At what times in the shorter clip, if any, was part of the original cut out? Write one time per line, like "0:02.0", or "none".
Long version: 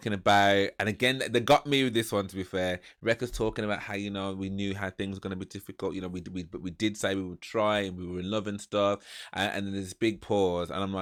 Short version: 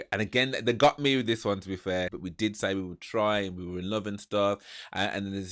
0:02.2